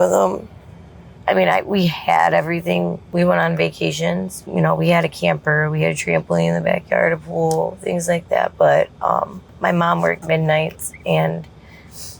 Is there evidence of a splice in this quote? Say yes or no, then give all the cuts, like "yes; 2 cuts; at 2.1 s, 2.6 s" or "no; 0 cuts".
yes; 3 cuts; at 1.1 s, 3.0 s, 4.4 s